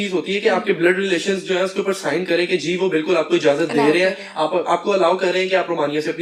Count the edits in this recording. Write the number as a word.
zero